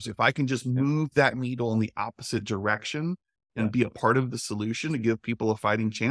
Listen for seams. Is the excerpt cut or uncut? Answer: uncut